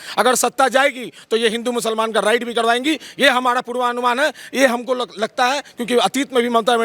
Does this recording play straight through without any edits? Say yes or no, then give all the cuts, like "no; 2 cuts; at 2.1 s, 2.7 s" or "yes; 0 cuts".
yes; 0 cuts